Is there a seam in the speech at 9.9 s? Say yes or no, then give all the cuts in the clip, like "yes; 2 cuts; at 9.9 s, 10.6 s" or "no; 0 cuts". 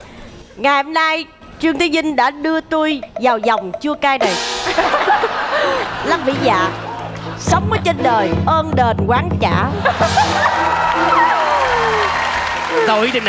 no; 0 cuts